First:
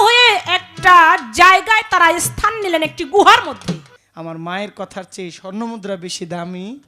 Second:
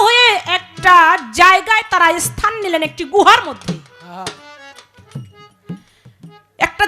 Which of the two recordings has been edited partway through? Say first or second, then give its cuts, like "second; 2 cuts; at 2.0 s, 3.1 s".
first; 1 cut; at 4.0 s